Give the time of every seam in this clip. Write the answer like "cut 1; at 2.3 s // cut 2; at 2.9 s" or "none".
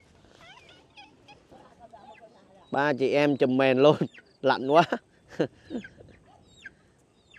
cut 1; at 1.5 s